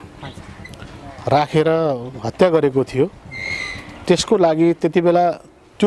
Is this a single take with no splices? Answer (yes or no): yes